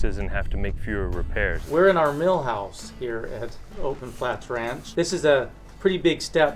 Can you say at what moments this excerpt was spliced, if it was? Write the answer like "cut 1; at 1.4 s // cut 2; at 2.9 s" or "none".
cut 1; at 1.6 s // cut 2; at 4.8 s